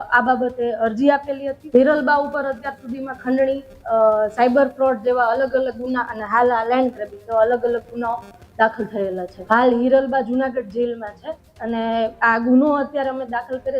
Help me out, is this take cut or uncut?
cut